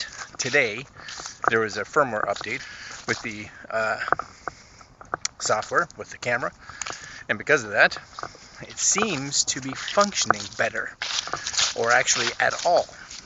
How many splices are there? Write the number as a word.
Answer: one